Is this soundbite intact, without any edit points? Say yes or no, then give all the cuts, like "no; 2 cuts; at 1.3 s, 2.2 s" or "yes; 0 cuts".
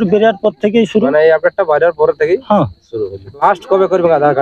no; 1 cut; at 3.4 s